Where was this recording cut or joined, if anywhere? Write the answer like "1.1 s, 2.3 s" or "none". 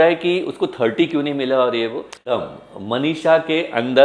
2.2 s